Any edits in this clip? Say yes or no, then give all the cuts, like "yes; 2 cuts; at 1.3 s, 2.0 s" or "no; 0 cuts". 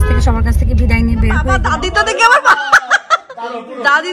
yes; 1 cut; at 1.7 s